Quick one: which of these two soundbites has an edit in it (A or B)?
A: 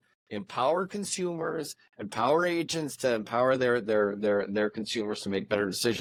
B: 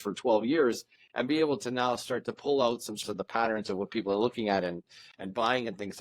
B